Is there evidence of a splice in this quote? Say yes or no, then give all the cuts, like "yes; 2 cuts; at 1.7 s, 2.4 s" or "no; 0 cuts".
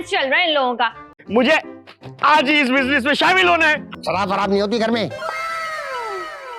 yes; 2 cuts; at 1.1 s, 3.9 s